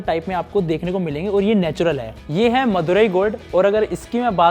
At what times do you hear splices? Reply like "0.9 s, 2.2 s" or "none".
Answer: 2.2 s